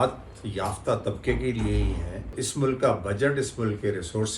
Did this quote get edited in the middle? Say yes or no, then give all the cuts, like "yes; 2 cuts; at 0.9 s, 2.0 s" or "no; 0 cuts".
yes; 1 cut; at 2.4 s